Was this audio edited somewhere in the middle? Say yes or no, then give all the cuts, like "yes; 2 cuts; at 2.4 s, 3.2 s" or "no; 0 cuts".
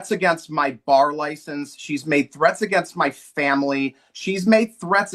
no; 0 cuts